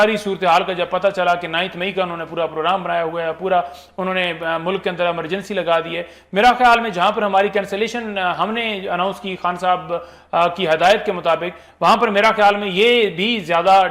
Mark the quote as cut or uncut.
uncut